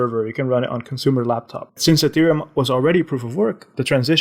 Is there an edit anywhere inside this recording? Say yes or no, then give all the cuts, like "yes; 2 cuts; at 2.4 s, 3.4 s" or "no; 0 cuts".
yes; 1 cut; at 1.8 s